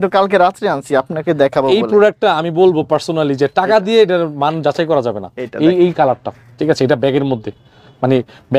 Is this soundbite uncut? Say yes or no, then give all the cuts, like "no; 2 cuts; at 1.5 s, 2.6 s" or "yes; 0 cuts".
yes; 0 cuts